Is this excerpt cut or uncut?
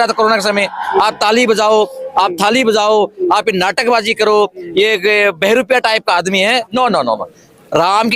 cut